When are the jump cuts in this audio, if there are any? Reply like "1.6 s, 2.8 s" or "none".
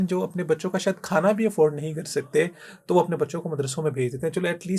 none